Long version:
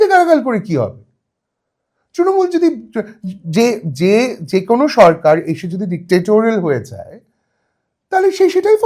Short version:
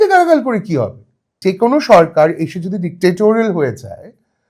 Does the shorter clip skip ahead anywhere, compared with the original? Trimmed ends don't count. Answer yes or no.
yes